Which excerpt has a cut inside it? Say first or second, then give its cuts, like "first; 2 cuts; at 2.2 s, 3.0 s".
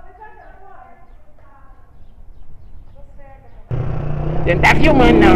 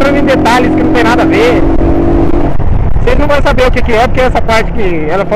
first; 1 cut; at 3.7 s